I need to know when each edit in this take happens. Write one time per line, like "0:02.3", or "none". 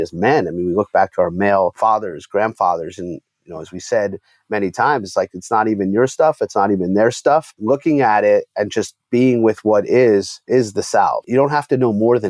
0:01.8
0:07.5
0:10.4
0:11.2